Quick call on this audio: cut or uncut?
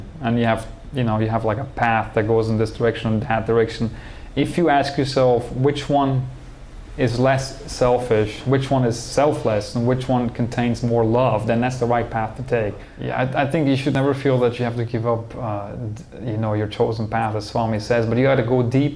cut